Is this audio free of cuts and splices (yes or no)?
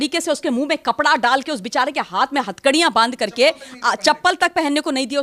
yes